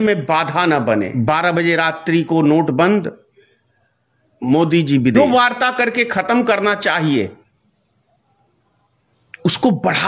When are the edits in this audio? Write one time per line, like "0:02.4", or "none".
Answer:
0:01.2
0:05.3